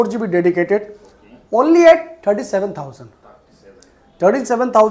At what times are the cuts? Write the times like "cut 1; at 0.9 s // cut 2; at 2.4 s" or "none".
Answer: none